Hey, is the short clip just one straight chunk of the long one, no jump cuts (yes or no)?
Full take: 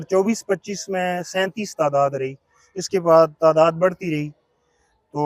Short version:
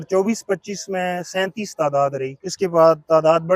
no